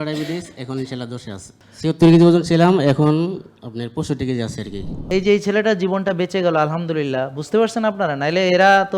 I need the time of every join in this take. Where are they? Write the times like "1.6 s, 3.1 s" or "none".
1.5 s, 5.1 s